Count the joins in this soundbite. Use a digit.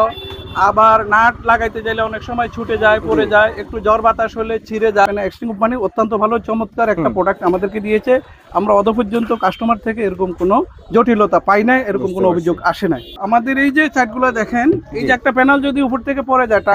2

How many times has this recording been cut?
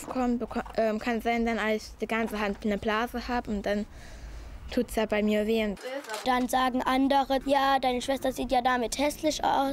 2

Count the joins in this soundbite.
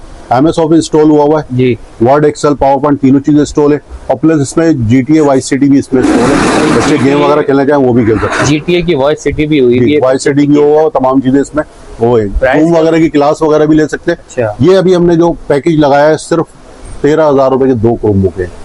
0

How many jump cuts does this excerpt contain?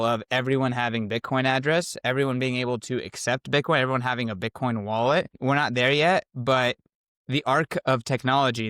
1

